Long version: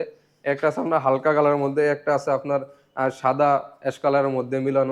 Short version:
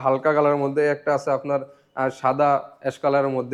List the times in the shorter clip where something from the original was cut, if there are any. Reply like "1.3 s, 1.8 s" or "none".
none

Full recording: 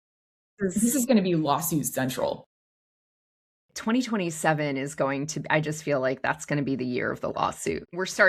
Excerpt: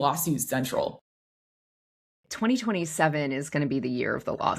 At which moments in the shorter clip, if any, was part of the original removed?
3.4 s

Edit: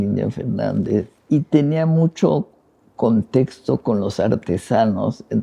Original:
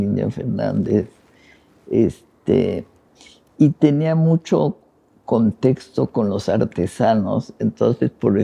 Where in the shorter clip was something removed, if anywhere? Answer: 1.1 s

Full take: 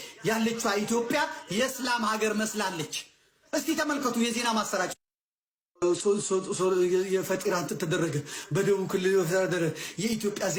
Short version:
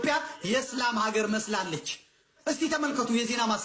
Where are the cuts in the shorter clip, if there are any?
none

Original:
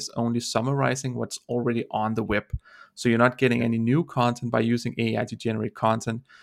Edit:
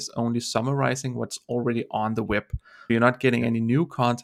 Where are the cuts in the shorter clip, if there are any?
2.9 s

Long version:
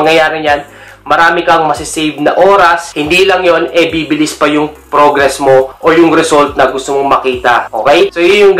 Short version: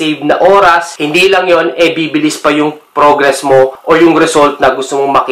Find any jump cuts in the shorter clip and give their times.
none

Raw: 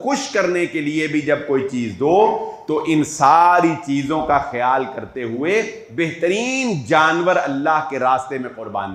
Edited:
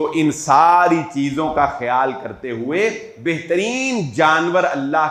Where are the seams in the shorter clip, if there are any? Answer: none

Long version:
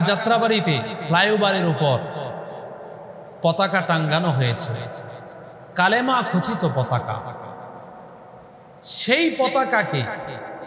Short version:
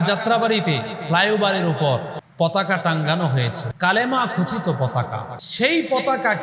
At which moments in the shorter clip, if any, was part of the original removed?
2.2 s, 3.6 s, 5.4 s

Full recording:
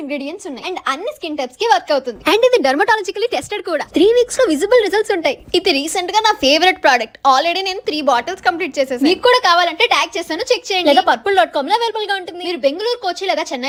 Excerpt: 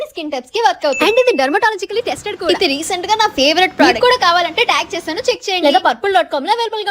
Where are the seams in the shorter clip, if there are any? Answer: 1.0 s, 2.4 s, 3.9 s

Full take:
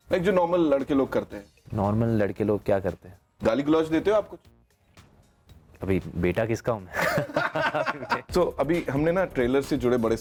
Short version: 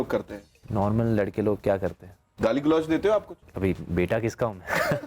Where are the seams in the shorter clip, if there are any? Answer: 3.4 s

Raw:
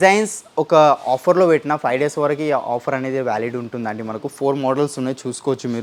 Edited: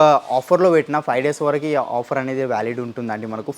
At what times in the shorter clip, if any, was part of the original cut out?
none

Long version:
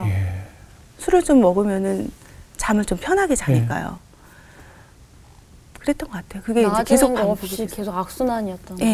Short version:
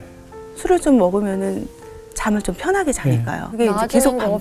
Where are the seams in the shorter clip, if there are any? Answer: 3.5 s

